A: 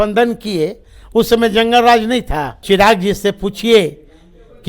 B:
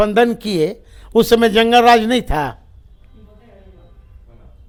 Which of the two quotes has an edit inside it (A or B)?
A